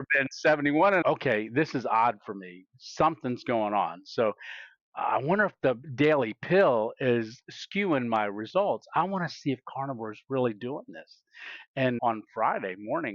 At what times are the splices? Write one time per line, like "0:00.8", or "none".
0:01.0
0:05.9
0:12.0